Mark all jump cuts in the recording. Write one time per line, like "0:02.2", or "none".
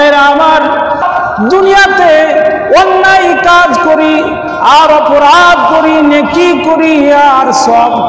0:01.0